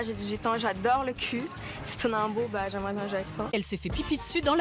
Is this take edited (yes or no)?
yes